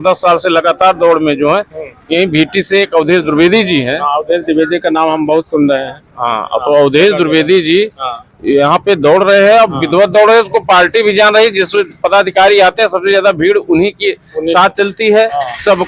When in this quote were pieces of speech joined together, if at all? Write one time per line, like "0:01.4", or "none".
none